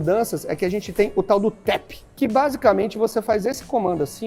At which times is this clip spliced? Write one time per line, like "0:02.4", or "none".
0:02.1